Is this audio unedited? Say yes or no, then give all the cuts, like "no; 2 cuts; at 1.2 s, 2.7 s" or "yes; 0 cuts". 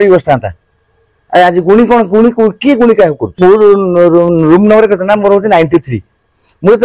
no; 1 cut; at 3.4 s